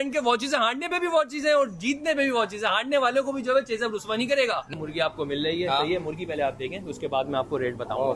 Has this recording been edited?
yes; 1 cut; at 4.7 s

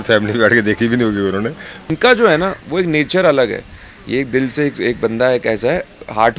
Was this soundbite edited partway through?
yes; 1 cut; at 1.7 s

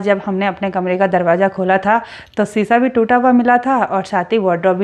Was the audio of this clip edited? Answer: no; 0 cuts

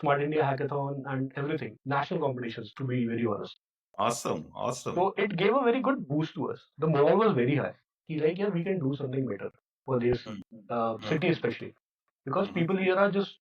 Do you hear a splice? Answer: no; 0 cuts

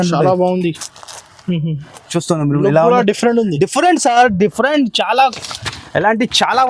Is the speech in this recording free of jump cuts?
yes; 0 cuts

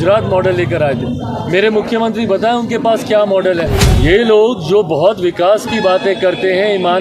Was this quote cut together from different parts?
yes; 1 cut; at 3.9 s

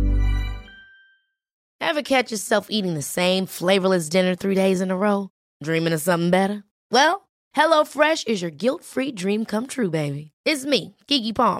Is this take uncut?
no; 1 cut; at 1.6 s

